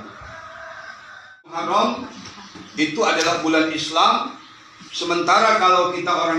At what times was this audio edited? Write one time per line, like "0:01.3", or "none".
0:01.6